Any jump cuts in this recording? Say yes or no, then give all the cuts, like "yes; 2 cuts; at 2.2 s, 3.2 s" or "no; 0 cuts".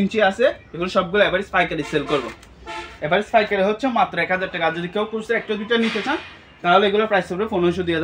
no; 0 cuts